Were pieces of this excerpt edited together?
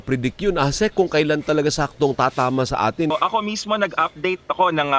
yes; 1 cut; at 3.1 s

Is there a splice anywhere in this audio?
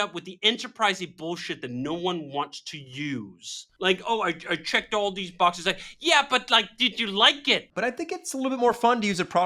yes; 2 cuts; at 3.7 s, 7.7 s

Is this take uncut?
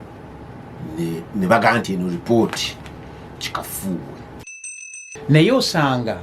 no; 1 cut; at 4.8 s

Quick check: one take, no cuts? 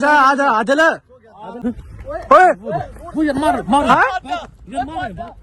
no; 1 cut; at 1.5 s

